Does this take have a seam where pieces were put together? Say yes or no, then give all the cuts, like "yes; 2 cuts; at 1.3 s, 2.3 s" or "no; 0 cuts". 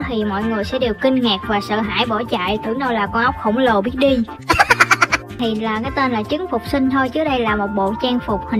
yes; 1 cut; at 5.4 s